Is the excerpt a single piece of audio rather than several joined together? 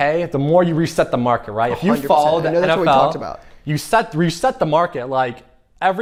yes; 0 cuts

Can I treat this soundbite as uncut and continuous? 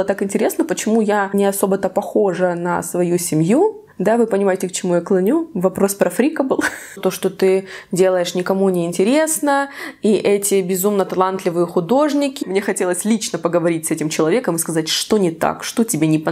no; 4 cuts; at 1.3 s, 3.9 s, 7.0 s, 12.4 s

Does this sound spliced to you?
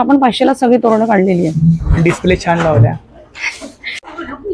no; 0 cuts

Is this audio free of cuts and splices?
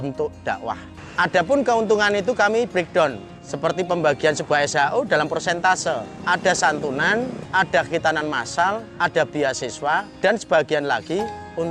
no; 5 cuts; at 1.0 s, 6.1 s, 7.4 s, 8.9 s, 10.1 s

